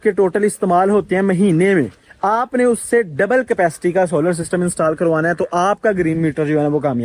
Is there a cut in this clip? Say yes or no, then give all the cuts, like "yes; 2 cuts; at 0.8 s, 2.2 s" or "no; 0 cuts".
no; 0 cuts